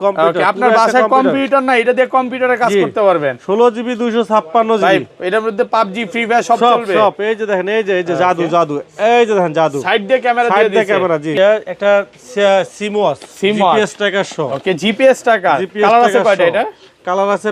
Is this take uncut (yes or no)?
no